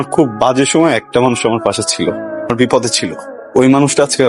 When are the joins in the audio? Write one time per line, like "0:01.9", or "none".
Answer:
none

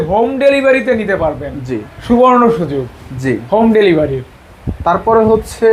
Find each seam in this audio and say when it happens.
none

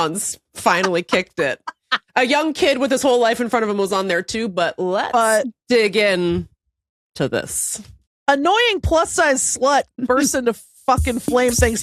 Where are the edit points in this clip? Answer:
0:08.3

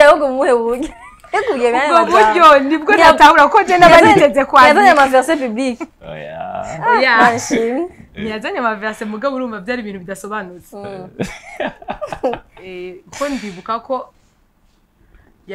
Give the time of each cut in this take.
none

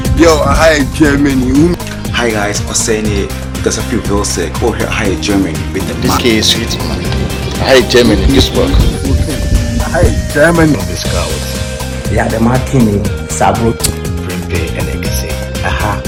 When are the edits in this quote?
none

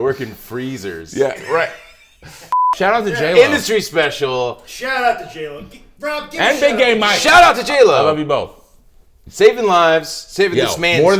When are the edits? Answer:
0:02.8

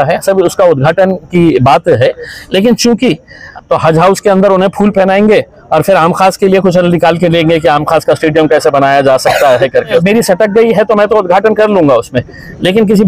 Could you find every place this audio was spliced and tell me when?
0:03.4
0:10.0

